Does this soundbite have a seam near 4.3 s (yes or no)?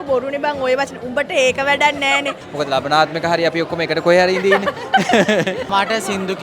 no